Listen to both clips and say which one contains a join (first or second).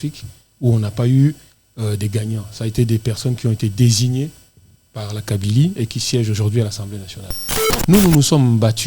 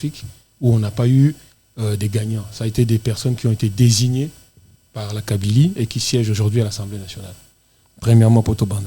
first